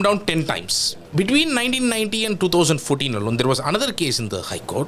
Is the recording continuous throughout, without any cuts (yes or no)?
no